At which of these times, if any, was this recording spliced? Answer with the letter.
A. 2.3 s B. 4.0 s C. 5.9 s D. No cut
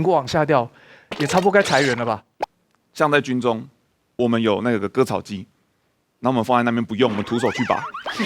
A